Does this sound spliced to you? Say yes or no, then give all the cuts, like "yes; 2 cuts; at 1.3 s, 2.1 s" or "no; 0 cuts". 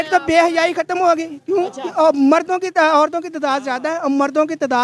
no; 0 cuts